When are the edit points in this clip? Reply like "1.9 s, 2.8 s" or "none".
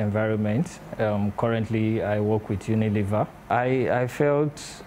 3.4 s